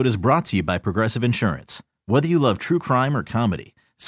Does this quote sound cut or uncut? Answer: uncut